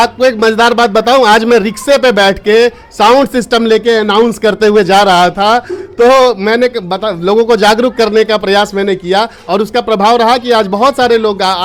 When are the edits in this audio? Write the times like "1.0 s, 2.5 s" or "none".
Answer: none